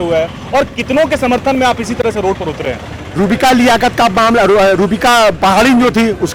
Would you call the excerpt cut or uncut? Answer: uncut